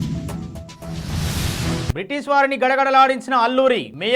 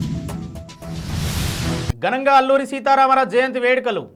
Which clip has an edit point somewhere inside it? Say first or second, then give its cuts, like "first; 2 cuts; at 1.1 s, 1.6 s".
first; 1 cut; at 1.9 s